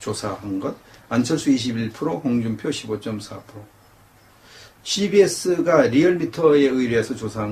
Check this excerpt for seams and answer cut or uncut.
cut